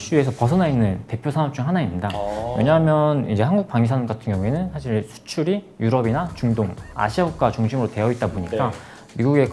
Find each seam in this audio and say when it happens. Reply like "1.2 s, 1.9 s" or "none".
none